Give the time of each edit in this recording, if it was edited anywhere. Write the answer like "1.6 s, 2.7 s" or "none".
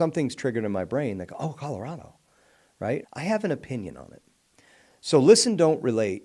3.0 s